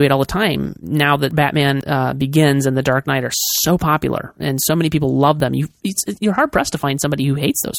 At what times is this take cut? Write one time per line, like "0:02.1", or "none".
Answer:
0:01.5
0:05.4